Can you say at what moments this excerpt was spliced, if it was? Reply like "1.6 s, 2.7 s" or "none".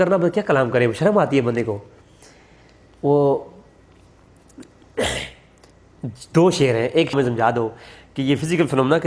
7.1 s